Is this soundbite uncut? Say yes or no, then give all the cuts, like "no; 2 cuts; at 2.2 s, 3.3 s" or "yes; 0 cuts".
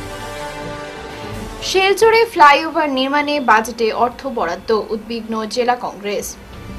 no; 1 cut; at 1.0 s